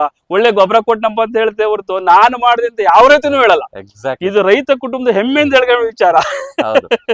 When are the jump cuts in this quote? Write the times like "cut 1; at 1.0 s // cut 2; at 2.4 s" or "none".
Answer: none